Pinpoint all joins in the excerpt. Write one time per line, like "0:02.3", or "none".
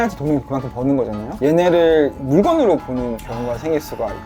0:01.4
0:02.2
0:03.2

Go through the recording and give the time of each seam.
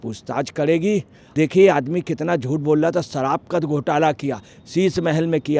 0:01.2

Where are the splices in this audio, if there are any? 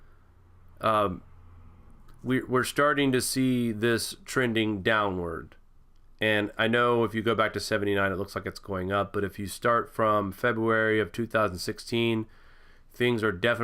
0:08.5

